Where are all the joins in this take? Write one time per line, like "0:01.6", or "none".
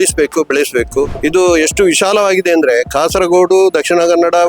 0:01.1